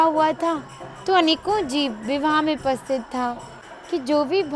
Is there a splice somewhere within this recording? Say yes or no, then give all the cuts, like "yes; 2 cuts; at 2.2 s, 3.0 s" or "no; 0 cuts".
yes; 1 cut; at 3.5 s